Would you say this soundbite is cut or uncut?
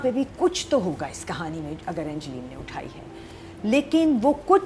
uncut